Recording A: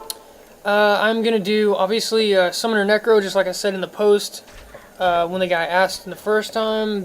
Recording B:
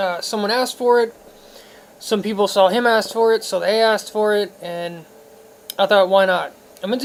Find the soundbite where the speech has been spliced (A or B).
A